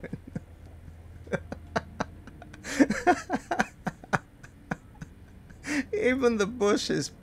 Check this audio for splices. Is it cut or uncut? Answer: uncut